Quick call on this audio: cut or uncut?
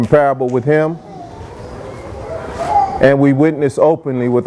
uncut